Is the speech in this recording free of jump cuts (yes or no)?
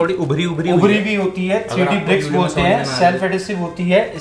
yes